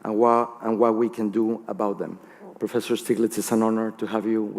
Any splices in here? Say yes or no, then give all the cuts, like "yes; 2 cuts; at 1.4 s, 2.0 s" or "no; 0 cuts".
yes; 1 cut; at 3.5 s